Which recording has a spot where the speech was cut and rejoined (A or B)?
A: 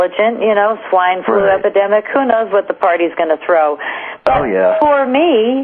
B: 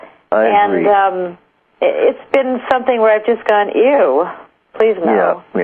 A